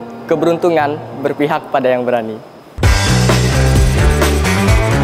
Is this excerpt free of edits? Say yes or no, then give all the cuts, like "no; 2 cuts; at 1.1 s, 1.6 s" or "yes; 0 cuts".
yes; 0 cuts